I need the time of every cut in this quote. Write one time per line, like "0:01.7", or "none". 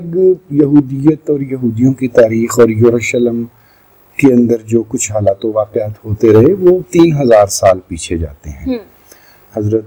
none